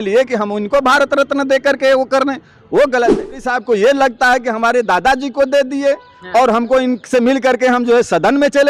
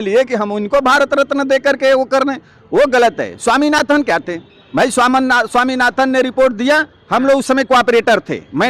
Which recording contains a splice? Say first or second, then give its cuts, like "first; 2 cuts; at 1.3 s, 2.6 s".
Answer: first; 1 cut; at 3.4 s